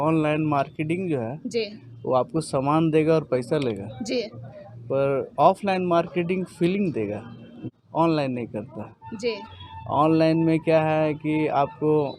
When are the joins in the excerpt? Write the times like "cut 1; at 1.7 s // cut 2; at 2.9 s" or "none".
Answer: cut 1; at 7.5 s